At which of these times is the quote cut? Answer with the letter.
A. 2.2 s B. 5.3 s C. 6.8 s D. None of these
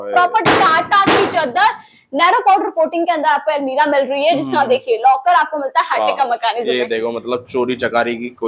D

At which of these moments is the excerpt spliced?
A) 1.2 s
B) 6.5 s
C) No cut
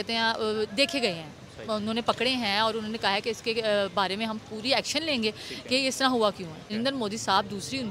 B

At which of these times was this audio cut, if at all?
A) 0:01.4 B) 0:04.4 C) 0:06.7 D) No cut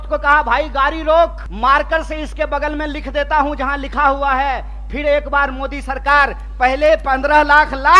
A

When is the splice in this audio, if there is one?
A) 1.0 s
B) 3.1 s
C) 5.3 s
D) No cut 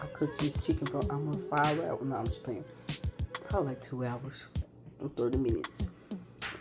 D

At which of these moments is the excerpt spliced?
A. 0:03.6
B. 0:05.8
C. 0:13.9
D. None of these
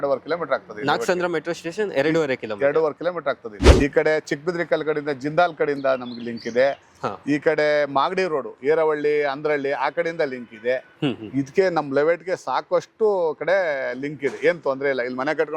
A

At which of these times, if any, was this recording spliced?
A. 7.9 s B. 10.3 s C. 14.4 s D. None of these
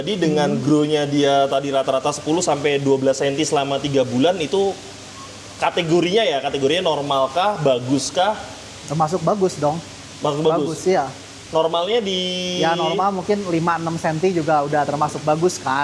D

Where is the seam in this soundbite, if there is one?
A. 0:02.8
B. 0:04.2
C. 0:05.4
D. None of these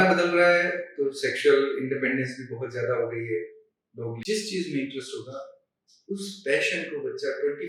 B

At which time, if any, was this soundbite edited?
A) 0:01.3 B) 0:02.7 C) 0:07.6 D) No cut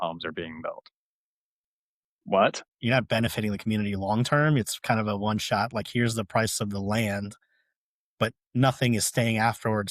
B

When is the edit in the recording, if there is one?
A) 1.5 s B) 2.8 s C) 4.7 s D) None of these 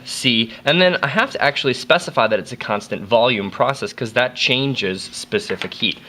A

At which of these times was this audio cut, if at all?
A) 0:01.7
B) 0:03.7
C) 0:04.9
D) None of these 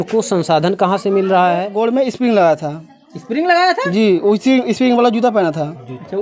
A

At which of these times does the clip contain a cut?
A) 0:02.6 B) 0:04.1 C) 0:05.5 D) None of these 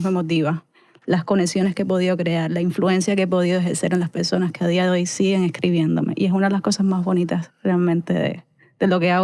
D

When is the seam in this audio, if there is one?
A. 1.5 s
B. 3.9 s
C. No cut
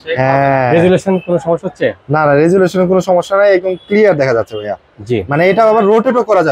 C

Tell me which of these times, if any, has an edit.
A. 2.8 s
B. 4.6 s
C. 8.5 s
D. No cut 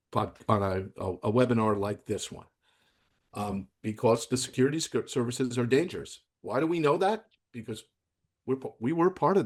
D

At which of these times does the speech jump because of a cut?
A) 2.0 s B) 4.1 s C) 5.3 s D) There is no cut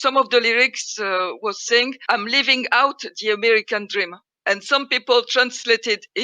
A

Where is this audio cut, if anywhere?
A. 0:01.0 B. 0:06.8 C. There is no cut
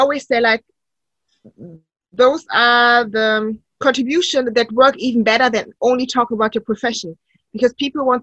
C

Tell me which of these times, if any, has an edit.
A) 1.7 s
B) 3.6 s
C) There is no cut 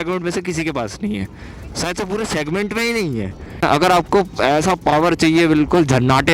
B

